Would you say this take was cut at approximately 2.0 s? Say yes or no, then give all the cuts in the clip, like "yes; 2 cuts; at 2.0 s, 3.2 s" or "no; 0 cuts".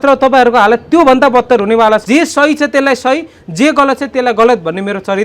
yes; 1 cut; at 2.0 s